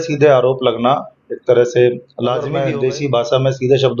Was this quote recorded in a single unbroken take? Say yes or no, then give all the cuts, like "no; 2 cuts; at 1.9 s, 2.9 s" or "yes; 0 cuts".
no; 1 cut; at 2.5 s